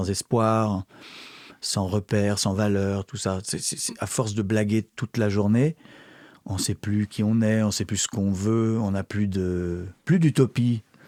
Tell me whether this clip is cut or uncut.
uncut